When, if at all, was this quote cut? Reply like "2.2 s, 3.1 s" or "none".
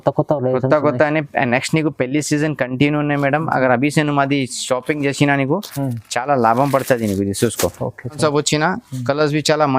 8.2 s